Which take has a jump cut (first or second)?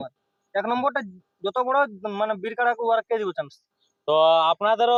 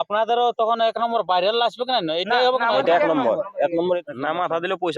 second